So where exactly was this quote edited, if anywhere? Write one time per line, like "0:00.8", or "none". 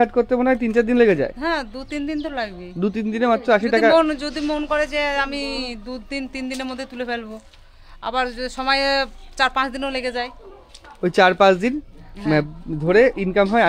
none